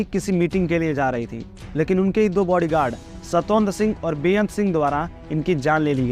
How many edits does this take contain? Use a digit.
0